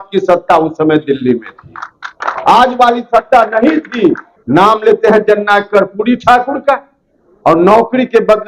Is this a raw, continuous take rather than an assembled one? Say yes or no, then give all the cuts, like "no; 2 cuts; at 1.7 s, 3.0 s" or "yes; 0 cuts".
no; 1 cut; at 4.3 s